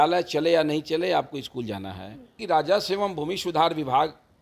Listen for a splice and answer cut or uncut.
cut